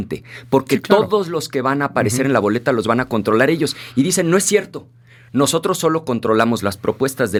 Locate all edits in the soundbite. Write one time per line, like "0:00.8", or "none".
none